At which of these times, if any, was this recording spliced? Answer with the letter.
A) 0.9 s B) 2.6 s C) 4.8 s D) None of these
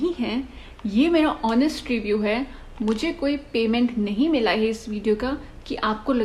D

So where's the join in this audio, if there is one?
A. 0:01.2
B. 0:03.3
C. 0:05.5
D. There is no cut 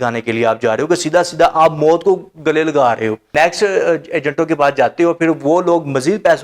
B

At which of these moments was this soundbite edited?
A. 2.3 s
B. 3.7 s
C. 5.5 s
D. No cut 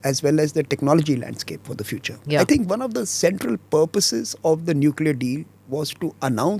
A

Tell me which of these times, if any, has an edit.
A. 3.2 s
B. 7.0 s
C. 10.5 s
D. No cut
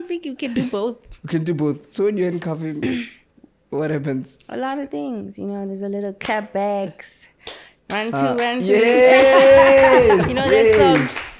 D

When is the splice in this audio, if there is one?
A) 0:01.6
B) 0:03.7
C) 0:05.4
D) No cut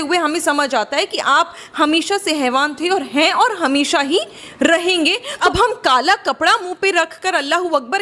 C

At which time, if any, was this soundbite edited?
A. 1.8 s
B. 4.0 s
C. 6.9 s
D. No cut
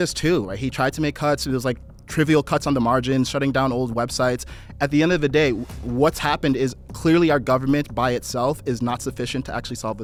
D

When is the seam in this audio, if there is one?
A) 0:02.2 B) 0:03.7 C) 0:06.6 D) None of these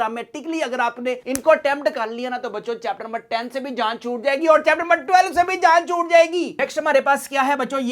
C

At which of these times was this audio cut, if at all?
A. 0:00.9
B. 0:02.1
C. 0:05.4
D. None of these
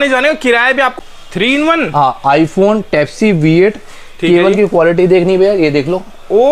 A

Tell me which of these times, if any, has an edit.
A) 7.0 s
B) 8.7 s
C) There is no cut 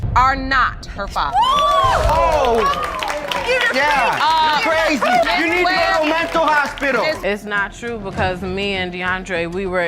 A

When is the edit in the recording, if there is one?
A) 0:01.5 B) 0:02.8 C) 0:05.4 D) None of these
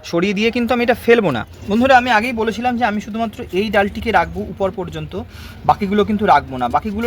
A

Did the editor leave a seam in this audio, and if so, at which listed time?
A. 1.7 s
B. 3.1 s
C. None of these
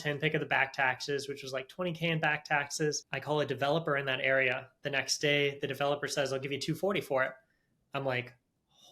B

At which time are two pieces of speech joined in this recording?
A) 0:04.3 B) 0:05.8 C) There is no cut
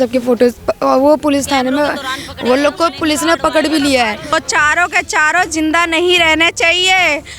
A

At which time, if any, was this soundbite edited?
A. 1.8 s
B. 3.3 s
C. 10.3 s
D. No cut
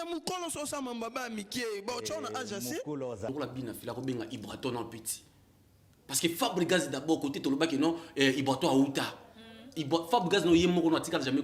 B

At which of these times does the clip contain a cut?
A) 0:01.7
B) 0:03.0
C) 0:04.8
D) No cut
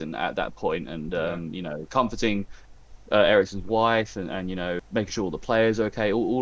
C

